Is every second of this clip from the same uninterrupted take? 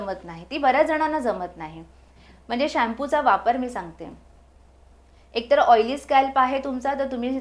yes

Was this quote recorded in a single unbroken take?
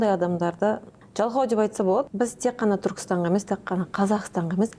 no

